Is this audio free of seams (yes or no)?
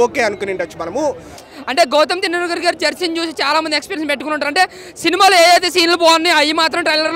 no